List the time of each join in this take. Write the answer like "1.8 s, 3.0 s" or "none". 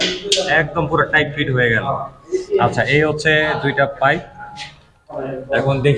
none